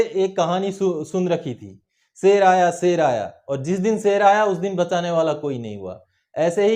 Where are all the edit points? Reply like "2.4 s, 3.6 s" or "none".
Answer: none